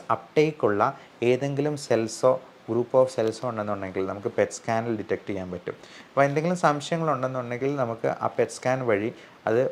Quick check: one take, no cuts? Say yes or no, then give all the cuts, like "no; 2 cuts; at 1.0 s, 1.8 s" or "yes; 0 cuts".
yes; 0 cuts